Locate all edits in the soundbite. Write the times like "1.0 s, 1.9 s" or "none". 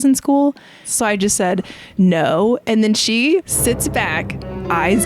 0.9 s, 3.5 s